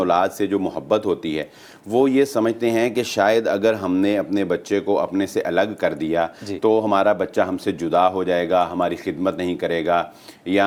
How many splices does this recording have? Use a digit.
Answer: 0